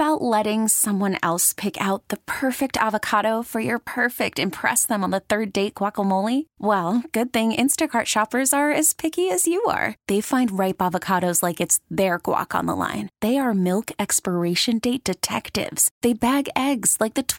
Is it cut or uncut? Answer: uncut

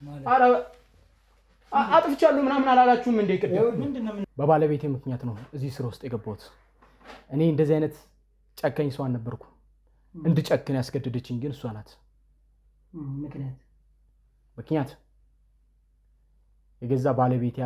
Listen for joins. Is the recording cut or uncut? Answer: cut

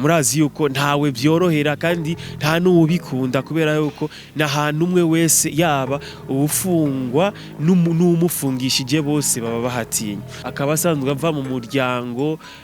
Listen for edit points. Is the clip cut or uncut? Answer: cut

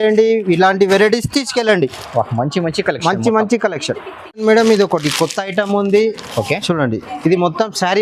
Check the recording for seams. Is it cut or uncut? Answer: cut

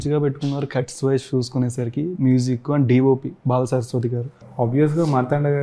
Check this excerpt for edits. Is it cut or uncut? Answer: cut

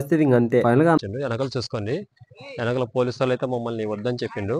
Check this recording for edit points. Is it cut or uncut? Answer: cut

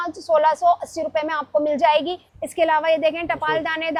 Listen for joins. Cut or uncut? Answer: uncut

